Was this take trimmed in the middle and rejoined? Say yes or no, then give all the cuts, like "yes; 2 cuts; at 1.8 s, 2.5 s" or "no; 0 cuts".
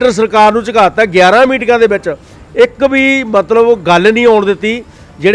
no; 0 cuts